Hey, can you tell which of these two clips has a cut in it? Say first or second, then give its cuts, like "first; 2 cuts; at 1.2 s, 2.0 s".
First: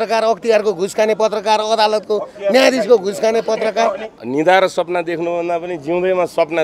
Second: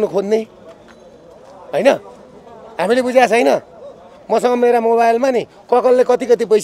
first; 1 cut; at 4.1 s